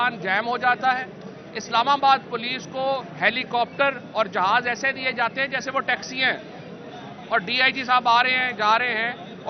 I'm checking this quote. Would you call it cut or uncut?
uncut